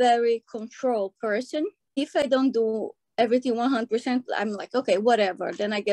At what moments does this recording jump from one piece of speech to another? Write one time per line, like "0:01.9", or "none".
0:02.0